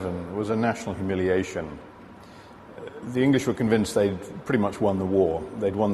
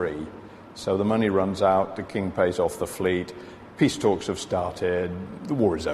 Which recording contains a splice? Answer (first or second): second